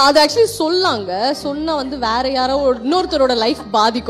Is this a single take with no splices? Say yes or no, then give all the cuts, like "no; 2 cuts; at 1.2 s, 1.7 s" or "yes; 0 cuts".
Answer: yes; 0 cuts